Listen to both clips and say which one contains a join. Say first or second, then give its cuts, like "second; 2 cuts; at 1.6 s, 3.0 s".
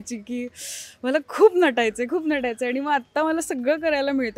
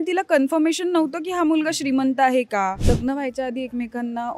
second; 1 cut; at 2.8 s